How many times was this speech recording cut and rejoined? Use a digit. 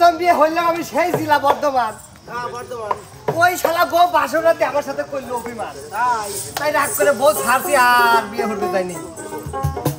0